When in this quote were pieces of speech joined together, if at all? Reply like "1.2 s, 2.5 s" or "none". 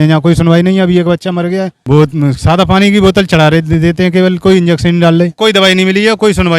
1.8 s, 5.4 s